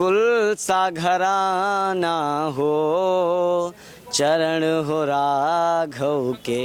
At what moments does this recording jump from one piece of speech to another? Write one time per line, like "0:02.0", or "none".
none